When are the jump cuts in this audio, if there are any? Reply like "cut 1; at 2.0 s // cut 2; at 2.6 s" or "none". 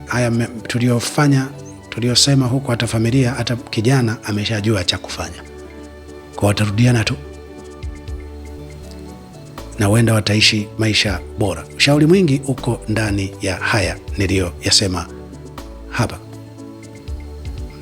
cut 1; at 7.2 s // cut 2; at 9.1 s